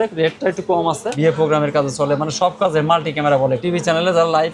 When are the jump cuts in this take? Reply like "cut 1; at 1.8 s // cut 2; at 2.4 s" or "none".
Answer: cut 1; at 1.1 s // cut 2; at 3.6 s